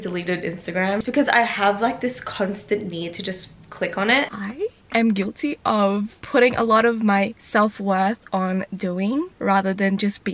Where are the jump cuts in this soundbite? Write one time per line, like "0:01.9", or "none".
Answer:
0:01.0
0:04.4
0:06.2
0:09.3